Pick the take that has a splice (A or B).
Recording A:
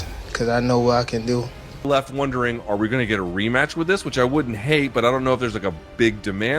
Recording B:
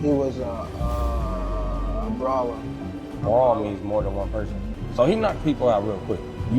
A